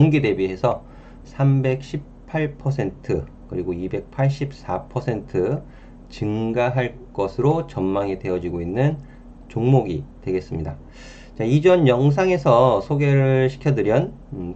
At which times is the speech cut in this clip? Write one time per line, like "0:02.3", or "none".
none